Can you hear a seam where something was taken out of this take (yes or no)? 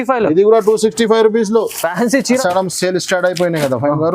yes